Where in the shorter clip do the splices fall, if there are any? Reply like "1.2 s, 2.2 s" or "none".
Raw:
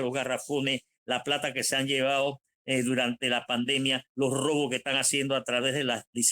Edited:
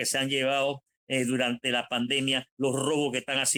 none